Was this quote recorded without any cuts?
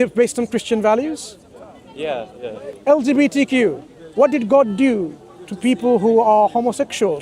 no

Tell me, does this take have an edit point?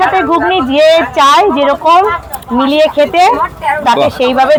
no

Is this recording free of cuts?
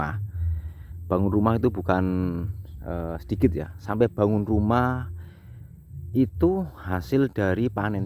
yes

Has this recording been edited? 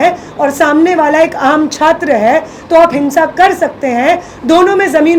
no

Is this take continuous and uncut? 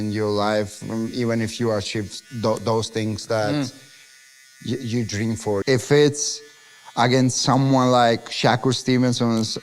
no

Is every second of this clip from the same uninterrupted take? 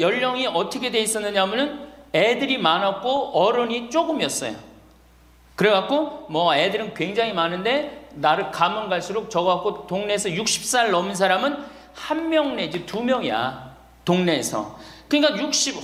yes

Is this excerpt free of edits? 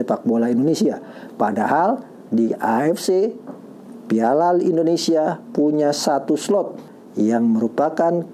no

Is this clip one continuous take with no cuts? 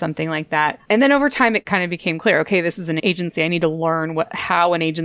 no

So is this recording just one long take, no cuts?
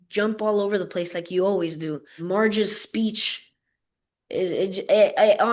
no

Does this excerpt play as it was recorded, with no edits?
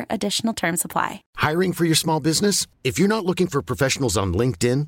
no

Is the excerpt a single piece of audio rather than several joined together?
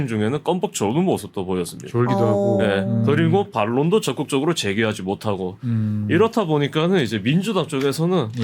yes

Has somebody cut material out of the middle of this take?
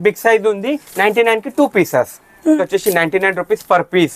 yes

